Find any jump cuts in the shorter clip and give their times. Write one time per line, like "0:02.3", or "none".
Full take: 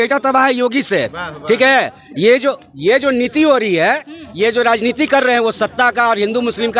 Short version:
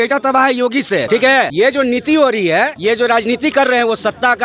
0:01.4
0:02.7